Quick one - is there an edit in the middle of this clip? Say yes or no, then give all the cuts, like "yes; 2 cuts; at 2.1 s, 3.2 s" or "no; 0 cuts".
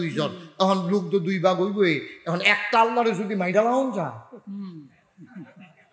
no; 0 cuts